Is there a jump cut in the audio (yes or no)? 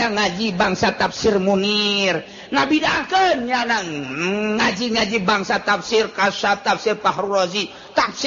no